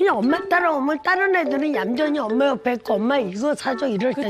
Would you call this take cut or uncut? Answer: uncut